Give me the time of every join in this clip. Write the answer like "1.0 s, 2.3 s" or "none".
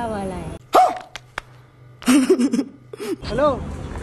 3.1 s